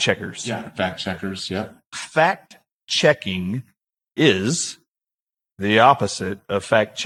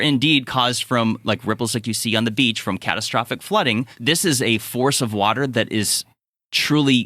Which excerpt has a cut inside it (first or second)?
second